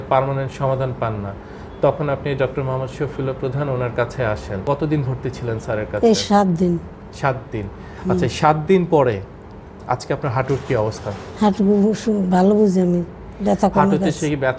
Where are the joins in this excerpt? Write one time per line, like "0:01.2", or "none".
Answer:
0:04.6